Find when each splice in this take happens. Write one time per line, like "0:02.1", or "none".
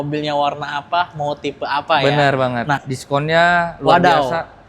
0:02.9